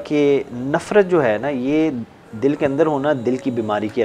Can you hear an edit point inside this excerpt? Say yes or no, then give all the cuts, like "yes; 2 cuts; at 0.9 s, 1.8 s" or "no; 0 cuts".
no; 0 cuts